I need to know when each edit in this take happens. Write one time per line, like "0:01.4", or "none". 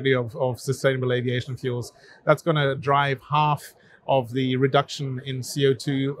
none